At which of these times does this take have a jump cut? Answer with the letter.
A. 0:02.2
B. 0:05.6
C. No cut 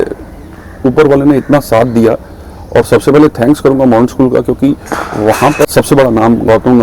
B